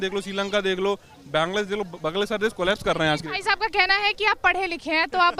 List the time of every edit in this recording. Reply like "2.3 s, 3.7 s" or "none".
none

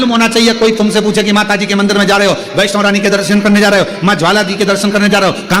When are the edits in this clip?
none

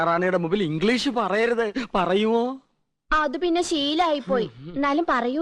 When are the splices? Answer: none

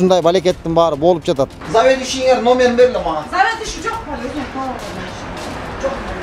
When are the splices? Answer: 1.6 s

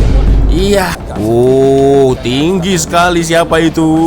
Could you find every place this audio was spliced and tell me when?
1.0 s

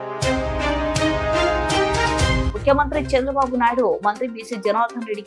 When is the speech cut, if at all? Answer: none

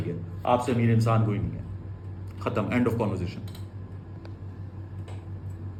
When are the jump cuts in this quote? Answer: none

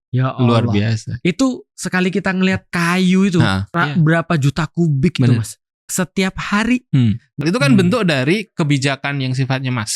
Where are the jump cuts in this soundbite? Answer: 2.7 s, 3.7 s, 5.7 s, 7.3 s

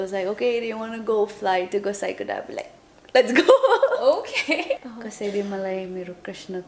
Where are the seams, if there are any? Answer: 4.9 s

